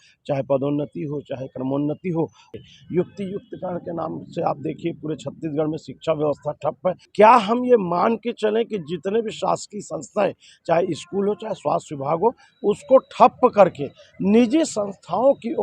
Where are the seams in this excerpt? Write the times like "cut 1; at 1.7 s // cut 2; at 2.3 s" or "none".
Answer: cut 1; at 2.4 s // cut 2; at 7.0 s